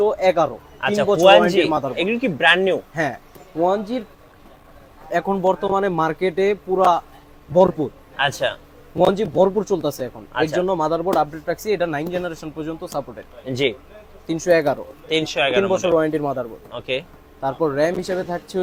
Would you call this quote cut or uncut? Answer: uncut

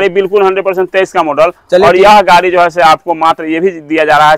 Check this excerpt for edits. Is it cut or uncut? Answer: uncut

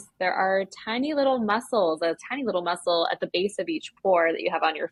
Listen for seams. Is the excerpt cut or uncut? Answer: uncut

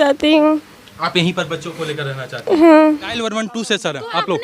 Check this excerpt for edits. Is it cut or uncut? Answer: cut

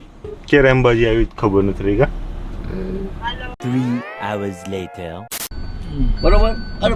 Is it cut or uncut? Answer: uncut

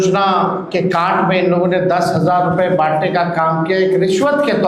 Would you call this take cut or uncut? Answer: uncut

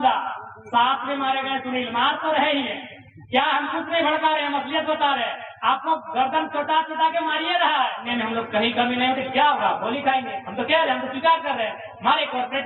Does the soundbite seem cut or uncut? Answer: cut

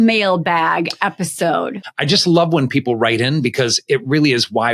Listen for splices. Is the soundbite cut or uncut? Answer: cut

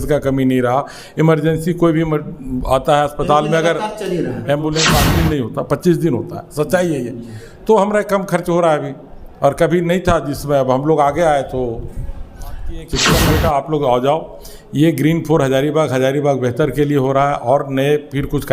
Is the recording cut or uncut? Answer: cut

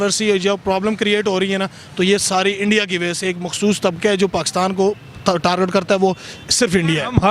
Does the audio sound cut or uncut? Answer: uncut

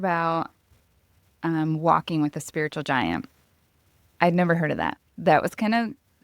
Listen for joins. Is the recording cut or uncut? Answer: uncut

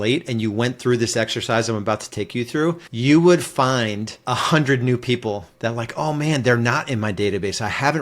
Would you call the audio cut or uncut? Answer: cut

